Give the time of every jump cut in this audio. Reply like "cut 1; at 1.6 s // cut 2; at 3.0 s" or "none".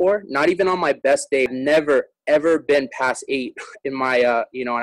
cut 1; at 1.5 s